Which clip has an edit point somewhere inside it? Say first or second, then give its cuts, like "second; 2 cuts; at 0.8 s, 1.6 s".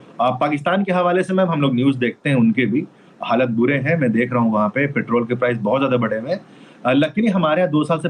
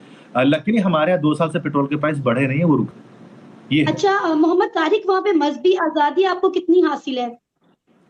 second; 1 cut; at 2.9 s